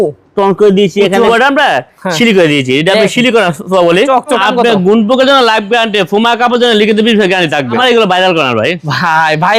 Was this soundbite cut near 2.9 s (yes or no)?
no